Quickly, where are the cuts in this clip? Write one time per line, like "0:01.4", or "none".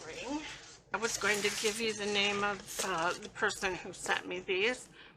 0:00.9